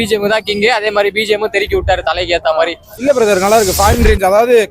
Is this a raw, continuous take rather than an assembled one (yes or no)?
no